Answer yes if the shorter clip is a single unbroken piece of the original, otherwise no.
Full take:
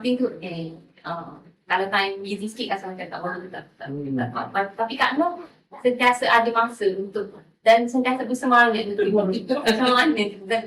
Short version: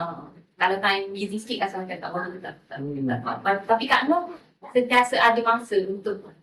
yes